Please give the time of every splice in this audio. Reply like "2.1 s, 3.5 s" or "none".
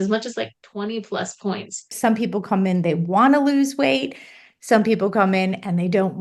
1.9 s